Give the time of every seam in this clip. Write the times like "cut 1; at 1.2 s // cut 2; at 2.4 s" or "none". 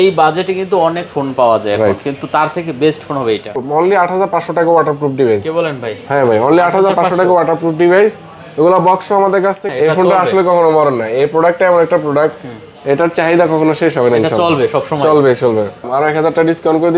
cut 1; at 3.5 s // cut 2; at 9.6 s // cut 3; at 15.9 s